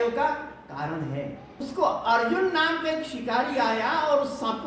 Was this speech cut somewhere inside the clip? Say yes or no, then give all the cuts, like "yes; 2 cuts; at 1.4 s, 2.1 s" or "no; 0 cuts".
yes; 1 cut; at 1.5 s